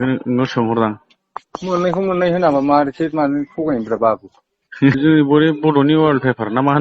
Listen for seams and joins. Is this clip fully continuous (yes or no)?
no